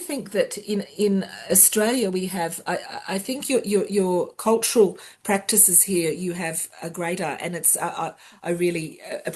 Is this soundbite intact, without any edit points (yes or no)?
yes